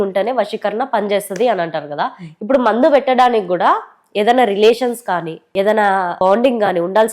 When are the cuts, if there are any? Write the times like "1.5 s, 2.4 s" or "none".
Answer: 6.1 s

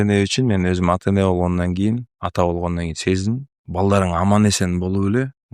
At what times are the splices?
3.6 s

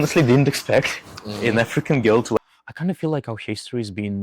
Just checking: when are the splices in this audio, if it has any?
2.4 s

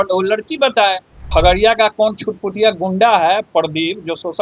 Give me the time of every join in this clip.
1.3 s

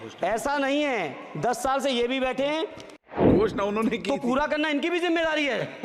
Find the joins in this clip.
3.1 s

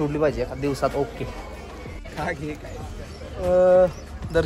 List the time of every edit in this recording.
1.5 s

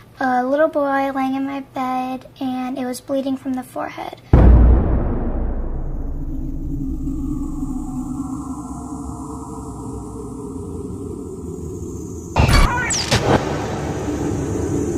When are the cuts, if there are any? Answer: 10.7 s

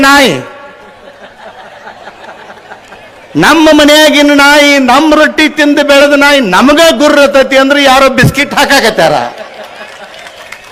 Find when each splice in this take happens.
none

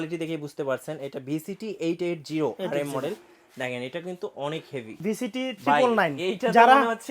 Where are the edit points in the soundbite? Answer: 5.0 s

